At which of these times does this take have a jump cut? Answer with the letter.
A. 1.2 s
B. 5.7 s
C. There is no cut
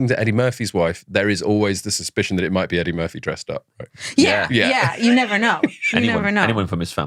C